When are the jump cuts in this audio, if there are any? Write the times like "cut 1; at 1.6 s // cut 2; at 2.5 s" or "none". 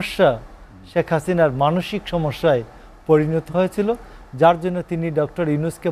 none